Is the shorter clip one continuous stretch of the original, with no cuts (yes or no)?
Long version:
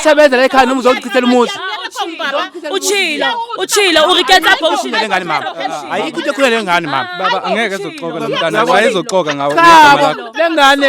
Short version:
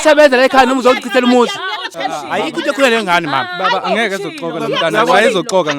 no